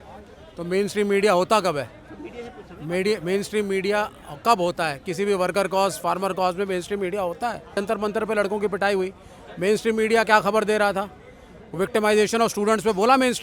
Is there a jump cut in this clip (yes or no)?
yes